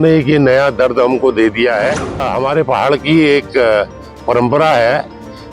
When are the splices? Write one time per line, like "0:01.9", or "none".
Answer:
0:02.3